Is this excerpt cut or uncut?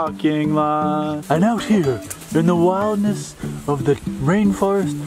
cut